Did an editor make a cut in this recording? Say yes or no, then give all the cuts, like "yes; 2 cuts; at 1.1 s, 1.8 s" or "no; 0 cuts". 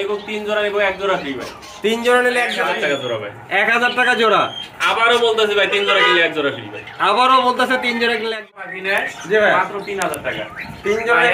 yes; 2 cuts; at 2.6 s, 8.5 s